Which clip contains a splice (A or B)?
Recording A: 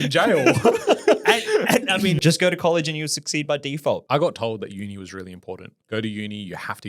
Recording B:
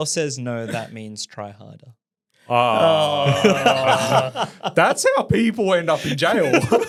A